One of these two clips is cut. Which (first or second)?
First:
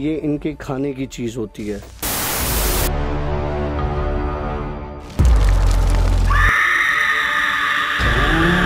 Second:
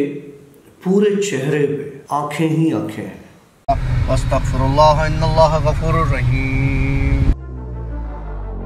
second